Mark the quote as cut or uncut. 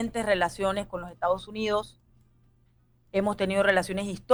uncut